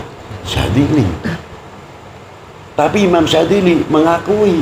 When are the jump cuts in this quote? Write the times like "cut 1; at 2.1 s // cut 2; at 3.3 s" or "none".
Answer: none